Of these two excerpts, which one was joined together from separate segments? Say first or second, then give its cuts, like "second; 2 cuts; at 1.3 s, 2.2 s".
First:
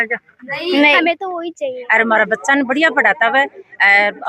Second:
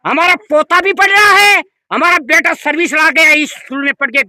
first; 1 cut; at 1.8 s